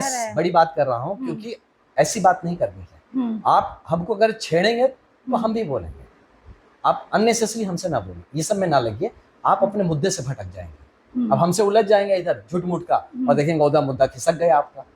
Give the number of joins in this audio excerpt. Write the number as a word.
zero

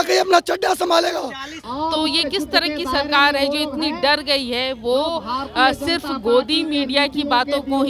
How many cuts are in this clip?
one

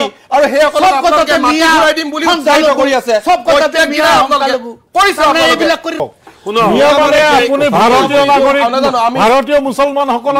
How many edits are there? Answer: one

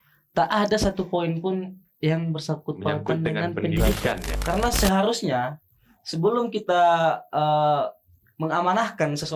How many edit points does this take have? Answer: one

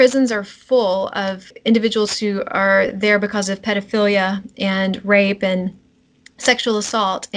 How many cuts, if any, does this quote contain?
one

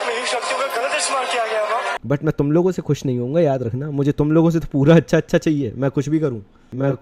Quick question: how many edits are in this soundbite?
one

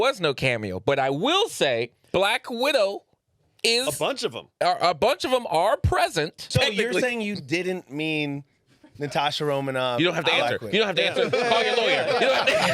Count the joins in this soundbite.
two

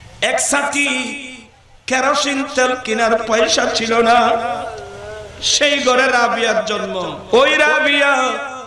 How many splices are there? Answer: one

